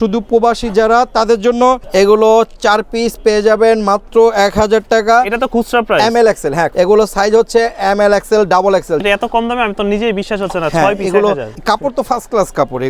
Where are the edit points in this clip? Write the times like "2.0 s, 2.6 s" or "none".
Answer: 1.8 s, 6.7 s, 9.0 s, 11.5 s